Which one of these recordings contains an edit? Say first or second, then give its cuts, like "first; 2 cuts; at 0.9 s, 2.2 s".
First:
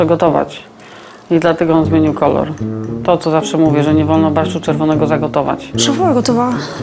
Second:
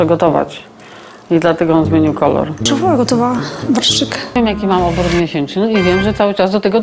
second; 2 cuts; at 2.6 s, 4.4 s